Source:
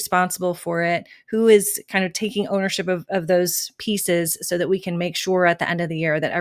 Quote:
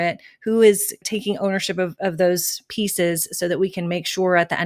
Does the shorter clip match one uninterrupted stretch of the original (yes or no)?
no